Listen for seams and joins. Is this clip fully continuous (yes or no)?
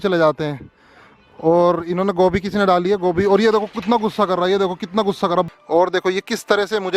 no